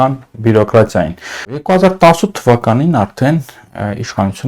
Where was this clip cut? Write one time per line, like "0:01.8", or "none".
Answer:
0:01.6